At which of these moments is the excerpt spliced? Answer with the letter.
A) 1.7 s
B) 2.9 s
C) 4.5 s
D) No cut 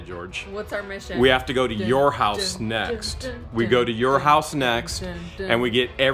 D